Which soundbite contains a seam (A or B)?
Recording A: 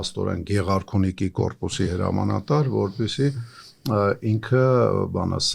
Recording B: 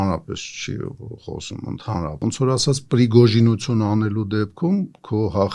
B